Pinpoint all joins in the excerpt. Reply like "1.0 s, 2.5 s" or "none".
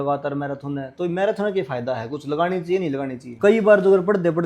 3.3 s